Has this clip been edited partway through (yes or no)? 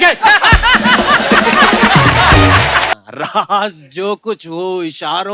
yes